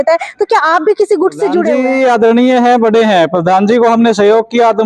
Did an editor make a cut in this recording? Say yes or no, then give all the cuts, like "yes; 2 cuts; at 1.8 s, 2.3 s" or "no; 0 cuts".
yes; 1 cut; at 1.7 s